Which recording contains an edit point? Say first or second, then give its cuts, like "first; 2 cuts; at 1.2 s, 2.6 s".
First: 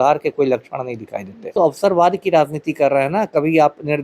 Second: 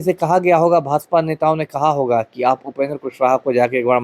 first; 1 cut; at 1.5 s